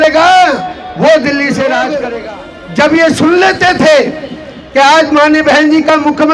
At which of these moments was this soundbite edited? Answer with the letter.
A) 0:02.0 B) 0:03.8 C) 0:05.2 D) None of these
A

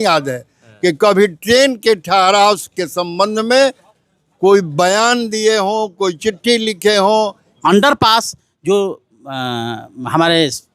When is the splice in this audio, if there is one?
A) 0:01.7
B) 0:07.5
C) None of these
B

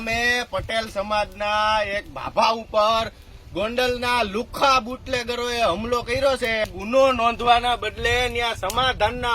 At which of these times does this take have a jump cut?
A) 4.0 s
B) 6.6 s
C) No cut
B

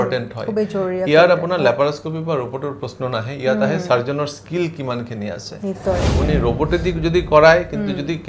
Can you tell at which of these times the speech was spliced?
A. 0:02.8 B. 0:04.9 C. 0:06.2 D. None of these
C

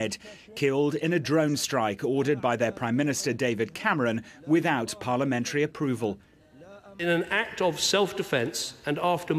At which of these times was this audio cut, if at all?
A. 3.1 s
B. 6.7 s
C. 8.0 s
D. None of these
C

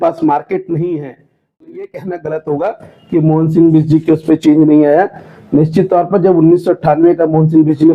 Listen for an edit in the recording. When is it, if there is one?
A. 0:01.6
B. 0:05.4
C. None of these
A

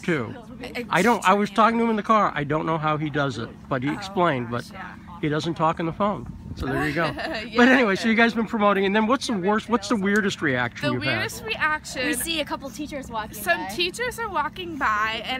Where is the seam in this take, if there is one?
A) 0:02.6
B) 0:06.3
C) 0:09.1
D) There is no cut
D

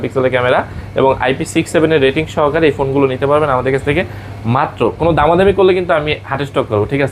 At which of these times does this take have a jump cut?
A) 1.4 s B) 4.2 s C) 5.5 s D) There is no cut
D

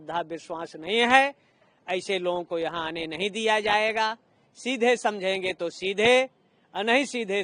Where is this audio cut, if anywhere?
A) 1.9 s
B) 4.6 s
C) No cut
C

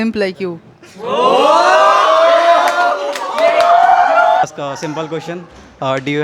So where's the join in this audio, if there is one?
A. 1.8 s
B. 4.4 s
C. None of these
B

